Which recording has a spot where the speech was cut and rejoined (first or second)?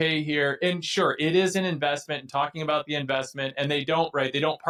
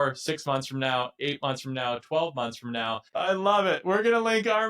second